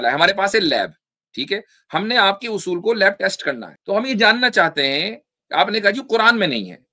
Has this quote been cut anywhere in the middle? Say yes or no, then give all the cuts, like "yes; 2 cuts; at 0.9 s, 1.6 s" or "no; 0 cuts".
yes; 1 cut; at 3.7 s